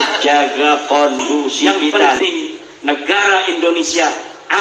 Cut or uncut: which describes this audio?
cut